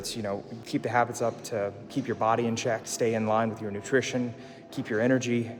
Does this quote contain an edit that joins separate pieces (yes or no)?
no